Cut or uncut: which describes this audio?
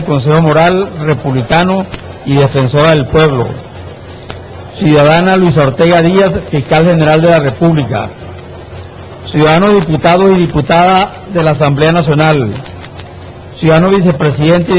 cut